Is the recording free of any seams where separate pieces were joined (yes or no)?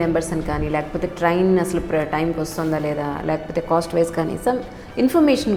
yes